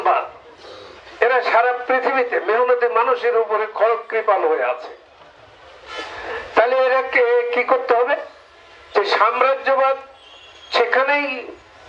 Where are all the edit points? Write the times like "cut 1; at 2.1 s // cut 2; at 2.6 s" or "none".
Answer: none